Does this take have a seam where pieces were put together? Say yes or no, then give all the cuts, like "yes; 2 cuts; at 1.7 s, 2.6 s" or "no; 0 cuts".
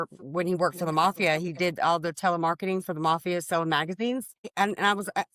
yes; 1 cut; at 4.4 s